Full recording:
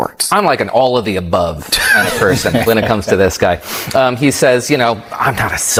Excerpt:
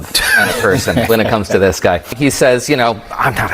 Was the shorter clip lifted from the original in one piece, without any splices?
no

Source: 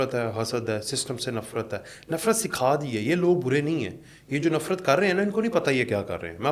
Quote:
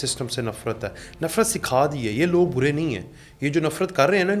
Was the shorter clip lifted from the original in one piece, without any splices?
yes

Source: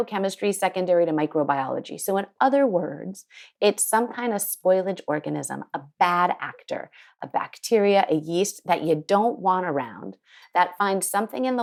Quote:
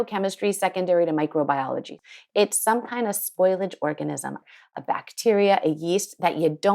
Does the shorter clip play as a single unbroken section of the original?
no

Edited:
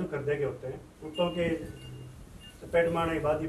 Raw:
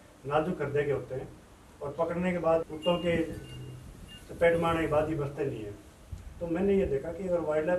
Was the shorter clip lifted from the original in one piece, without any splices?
no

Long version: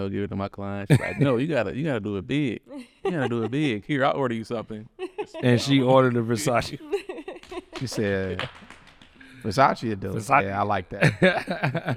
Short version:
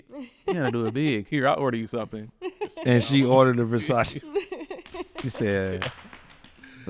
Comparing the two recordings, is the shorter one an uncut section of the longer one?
yes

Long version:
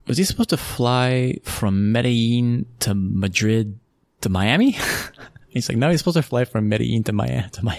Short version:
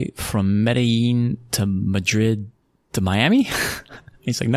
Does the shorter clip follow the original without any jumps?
yes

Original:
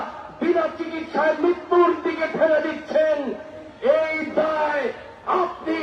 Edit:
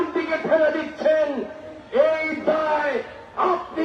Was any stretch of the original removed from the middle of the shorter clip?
no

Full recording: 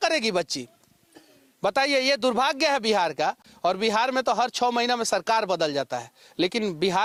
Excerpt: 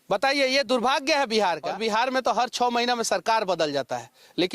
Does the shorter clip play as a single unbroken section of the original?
no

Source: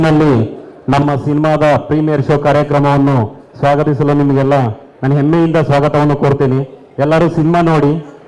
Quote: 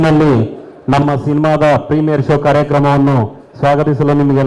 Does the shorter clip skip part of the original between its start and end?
no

